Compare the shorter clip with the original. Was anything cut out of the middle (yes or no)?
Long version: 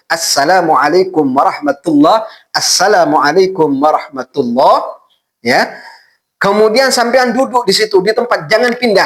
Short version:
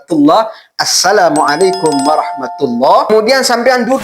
yes